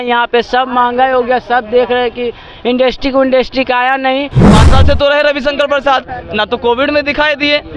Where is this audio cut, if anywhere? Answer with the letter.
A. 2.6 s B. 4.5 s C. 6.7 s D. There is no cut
B